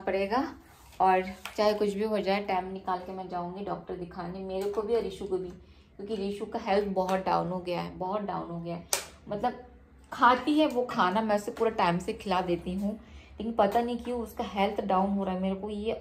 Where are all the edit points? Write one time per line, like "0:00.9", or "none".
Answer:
none